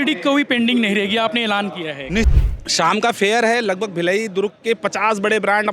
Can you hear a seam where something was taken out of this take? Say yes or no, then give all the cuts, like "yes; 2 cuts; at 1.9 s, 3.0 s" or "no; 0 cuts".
yes; 1 cut; at 2.3 s